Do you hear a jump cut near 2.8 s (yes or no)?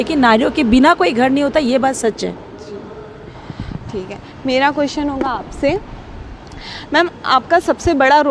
no